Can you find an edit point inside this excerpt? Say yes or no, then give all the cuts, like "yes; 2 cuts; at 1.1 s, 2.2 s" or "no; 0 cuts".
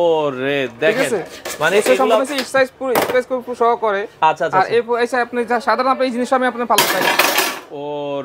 no; 0 cuts